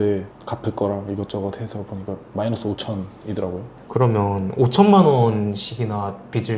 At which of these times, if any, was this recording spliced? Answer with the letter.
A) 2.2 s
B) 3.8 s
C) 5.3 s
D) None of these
D